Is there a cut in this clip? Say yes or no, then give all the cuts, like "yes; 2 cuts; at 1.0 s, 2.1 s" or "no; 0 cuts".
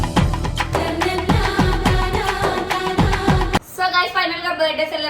yes; 1 cut; at 3.6 s